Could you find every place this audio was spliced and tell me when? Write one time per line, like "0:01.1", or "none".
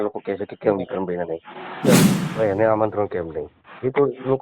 0:02.0